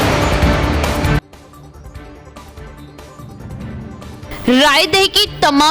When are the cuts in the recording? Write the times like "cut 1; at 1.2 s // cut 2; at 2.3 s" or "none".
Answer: cut 1; at 1.0 s

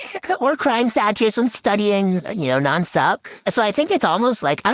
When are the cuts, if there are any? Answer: cut 1; at 3.4 s

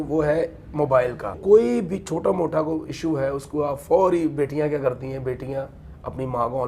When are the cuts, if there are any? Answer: cut 1; at 1.4 s

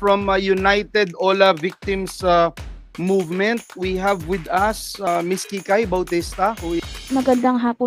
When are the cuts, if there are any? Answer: cut 1; at 5.1 s // cut 2; at 6.9 s

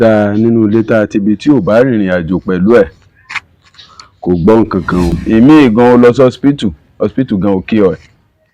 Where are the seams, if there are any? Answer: cut 1; at 5.2 s

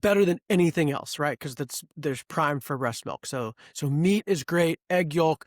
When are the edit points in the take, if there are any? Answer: none

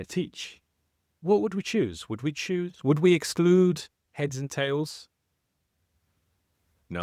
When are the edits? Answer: none

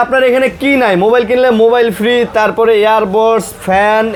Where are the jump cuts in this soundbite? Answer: none

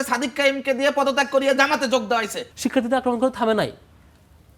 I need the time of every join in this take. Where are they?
cut 1; at 2.4 s

